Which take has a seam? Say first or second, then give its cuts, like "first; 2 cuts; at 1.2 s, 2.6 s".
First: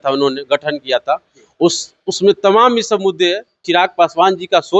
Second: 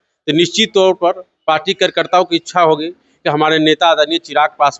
first; 1 cut; at 3.6 s